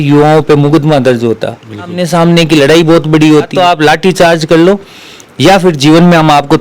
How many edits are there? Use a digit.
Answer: 2